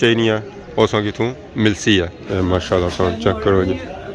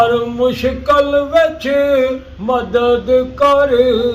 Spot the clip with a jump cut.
first; 1 cut; at 2.2 s

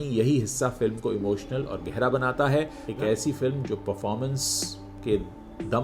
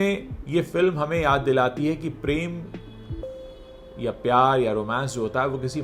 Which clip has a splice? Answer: first; 1 cut; at 2.8 s

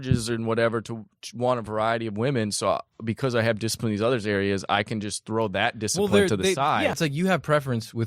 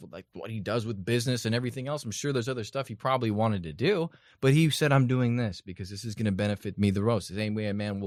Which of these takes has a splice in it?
first; 1 cut; at 7.0 s

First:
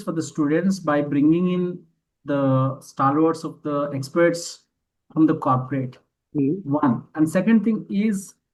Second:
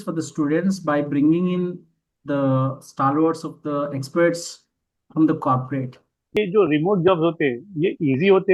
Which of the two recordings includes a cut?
second; 1 cut; at 6.4 s

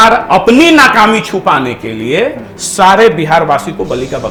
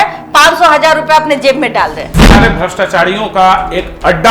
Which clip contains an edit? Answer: second; 1 cut; at 2.3 s

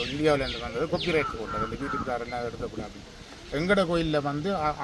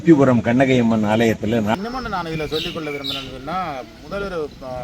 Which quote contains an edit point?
second; 1 cut; at 1.7 s

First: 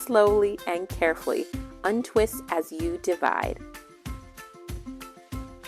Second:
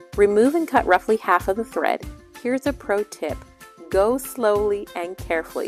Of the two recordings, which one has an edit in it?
first; 1 cut; at 3.6 s

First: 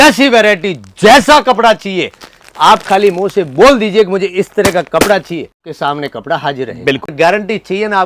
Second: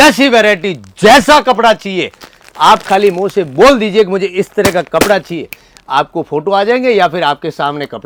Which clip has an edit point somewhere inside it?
first; 2 cuts; at 5.7 s, 7.1 s

